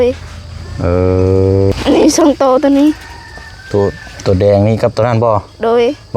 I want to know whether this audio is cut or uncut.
cut